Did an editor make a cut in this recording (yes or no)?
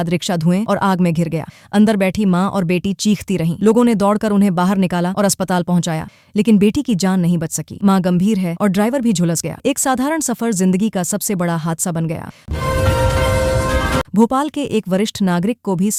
no